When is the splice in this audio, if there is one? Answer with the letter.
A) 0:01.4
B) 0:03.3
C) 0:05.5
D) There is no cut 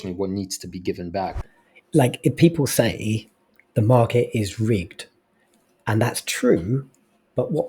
A